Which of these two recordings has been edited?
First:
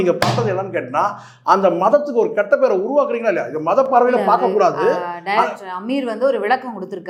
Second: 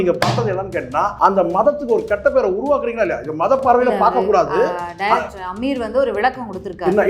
second; 1 cut; at 1.1 s

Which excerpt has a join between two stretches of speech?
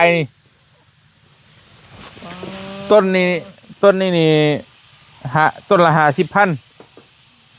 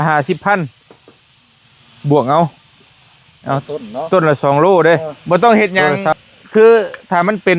second; 1 cut; at 5.1 s

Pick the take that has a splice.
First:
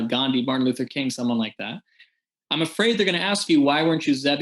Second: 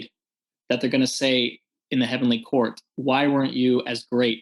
first; 1 cut; at 3.4 s

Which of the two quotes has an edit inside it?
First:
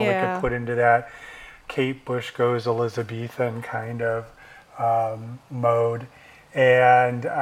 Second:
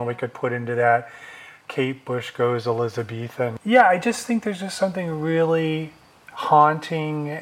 second; 1 cut; at 3.6 s

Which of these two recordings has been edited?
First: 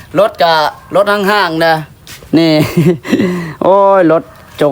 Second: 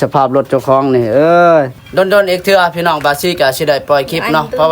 second; 1 cut; at 1.7 s

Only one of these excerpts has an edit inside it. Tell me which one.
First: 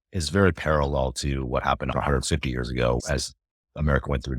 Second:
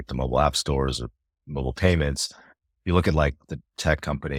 first; 2 cuts; at 1.9 s, 3.0 s

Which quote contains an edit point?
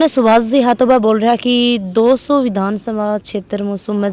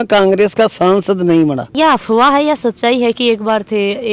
second; 1 cut; at 1.7 s

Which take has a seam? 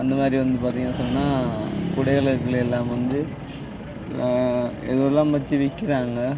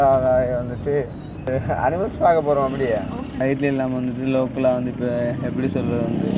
second; 2 cuts; at 1.5 s, 3.2 s

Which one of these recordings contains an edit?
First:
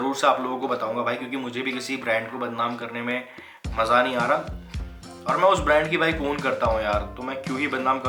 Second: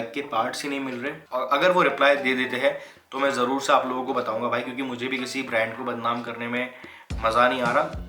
second; 1 cut; at 1.2 s

